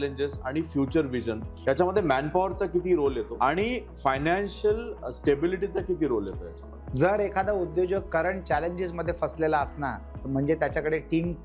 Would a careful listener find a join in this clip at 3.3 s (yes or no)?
yes